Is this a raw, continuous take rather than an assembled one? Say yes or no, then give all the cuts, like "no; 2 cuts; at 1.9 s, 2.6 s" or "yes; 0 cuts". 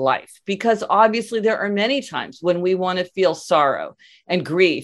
yes; 0 cuts